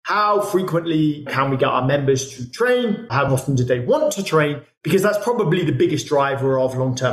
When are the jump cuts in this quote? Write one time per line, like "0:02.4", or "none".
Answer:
0:01.3
0:03.3